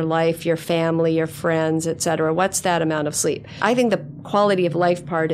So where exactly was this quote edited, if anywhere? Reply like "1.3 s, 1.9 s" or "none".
3.6 s